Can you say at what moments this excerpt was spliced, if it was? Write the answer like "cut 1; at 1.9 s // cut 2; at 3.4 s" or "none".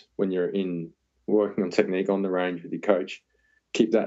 none